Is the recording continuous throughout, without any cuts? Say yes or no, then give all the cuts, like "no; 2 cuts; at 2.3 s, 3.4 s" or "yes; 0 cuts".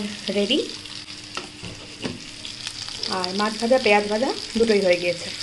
yes; 0 cuts